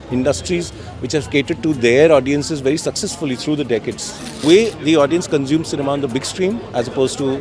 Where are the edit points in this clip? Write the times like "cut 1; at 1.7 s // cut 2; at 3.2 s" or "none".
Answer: cut 1; at 4.4 s